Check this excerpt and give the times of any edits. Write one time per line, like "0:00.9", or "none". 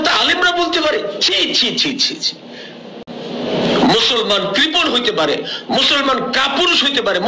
none